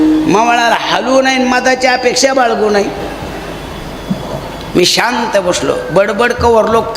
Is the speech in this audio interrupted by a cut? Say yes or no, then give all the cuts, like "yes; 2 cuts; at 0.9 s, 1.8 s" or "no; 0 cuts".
no; 0 cuts